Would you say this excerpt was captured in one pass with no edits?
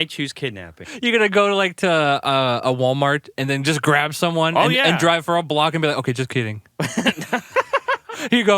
no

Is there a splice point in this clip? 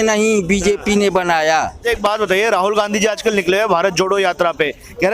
yes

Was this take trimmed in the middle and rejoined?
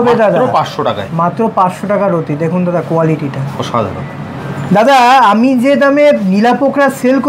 no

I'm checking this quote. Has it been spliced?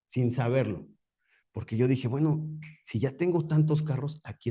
no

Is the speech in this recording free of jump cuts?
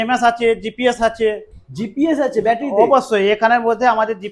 yes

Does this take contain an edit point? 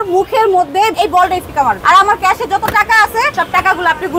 yes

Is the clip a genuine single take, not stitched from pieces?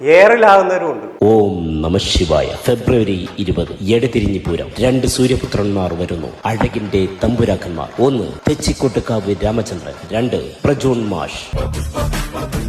yes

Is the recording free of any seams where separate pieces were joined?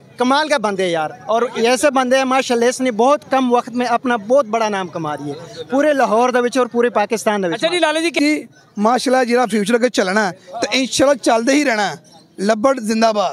no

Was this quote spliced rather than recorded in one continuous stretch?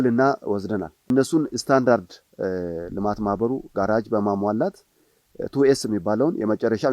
yes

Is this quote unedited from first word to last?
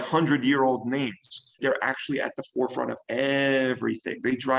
no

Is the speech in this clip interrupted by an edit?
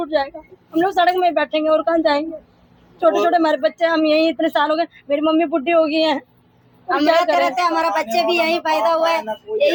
no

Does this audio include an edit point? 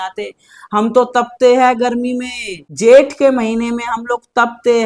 no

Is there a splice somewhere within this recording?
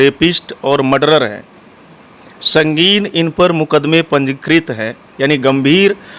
no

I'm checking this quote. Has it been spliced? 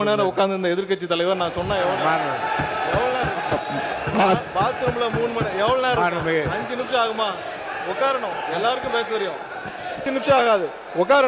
yes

